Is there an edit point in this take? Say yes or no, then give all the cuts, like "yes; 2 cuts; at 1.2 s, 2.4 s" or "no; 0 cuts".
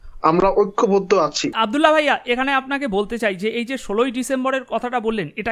yes; 1 cut; at 1.5 s